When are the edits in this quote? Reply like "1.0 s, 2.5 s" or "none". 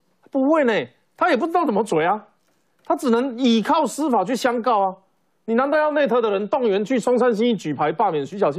none

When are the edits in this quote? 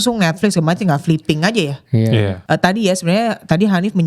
2.4 s

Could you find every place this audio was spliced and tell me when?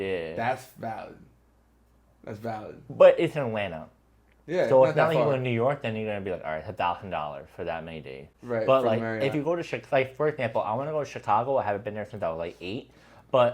none

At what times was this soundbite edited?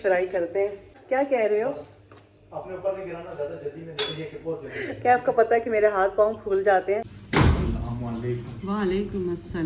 none

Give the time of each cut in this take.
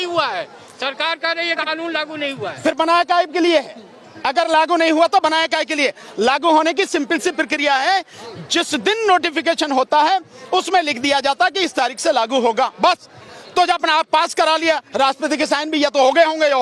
none

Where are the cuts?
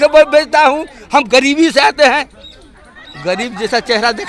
none

